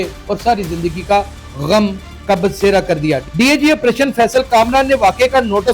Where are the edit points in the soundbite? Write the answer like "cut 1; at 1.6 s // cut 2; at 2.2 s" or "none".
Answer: cut 1; at 3.2 s